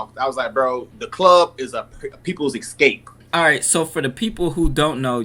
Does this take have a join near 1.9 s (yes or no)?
no